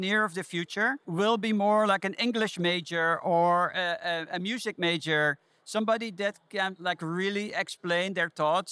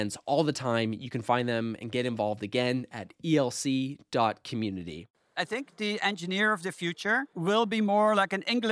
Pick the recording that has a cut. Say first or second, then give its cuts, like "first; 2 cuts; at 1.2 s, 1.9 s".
second; 1 cut; at 5.3 s